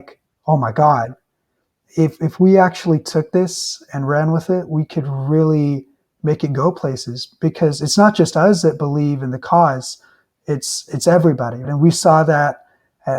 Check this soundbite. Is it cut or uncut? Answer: cut